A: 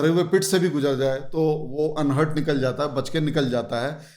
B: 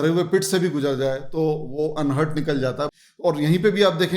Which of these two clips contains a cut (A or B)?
B